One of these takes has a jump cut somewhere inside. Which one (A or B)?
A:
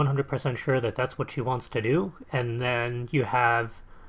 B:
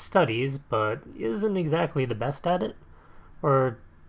B